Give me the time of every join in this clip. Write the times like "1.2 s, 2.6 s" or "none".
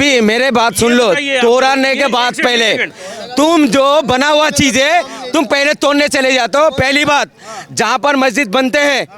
none